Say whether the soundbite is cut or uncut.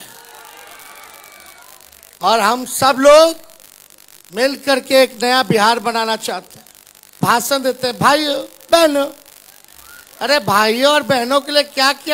cut